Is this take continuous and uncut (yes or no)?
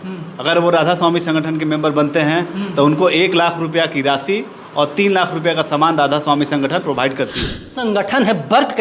no